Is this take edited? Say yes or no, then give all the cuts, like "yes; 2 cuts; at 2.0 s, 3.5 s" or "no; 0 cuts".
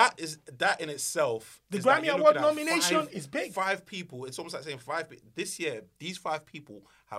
no; 0 cuts